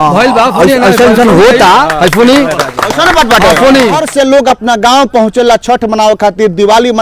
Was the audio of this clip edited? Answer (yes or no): yes